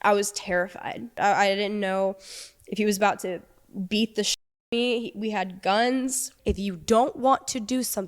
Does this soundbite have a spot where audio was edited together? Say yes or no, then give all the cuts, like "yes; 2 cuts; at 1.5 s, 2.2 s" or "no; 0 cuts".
yes; 2 cuts; at 1.2 s, 6.3 s